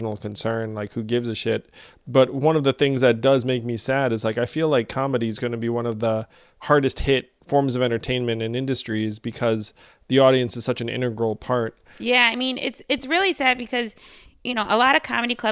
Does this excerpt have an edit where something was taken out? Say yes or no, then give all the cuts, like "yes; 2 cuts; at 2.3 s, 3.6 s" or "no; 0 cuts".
yes; 2 cuts; at 7.3 s, 12.0 s